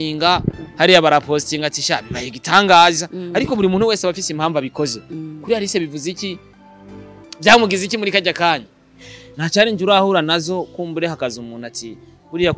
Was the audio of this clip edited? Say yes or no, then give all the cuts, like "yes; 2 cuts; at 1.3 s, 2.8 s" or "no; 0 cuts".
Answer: yes; 1 cut; at 9.2 s